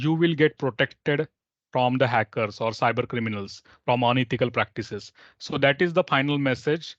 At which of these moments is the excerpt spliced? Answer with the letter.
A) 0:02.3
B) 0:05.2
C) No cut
C